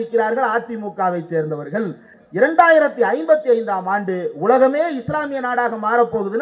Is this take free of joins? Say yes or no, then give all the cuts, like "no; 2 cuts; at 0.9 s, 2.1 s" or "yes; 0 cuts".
no; 1 cut; at 2.1 s